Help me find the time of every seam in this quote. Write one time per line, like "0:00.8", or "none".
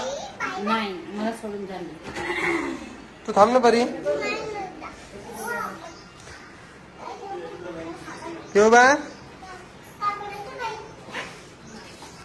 none